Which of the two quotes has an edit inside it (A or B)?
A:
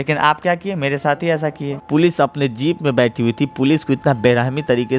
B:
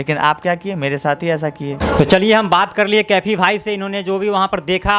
A